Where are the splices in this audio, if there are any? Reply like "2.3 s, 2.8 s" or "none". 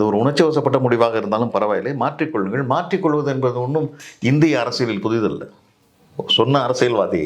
none